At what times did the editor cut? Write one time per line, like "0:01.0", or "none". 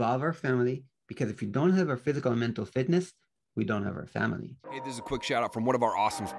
0:04.7